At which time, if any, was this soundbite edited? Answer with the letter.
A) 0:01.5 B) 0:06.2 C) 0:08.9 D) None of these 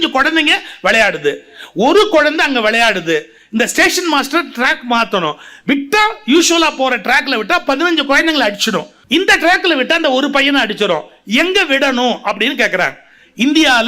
C